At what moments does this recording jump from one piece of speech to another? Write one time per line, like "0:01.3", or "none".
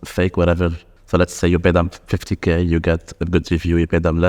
0:00.9